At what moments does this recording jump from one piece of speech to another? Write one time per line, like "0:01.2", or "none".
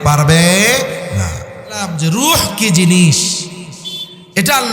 0:01.9